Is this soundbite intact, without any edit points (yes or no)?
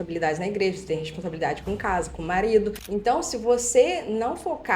no